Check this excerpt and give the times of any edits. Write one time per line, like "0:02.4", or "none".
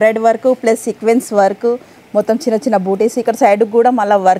none